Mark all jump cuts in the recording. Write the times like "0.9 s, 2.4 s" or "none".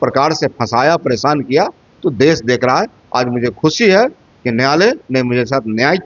none